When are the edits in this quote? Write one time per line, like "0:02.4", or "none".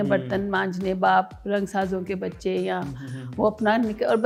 none